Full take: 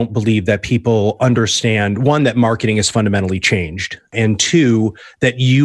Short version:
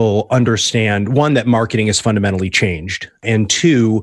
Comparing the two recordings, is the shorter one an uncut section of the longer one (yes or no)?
yes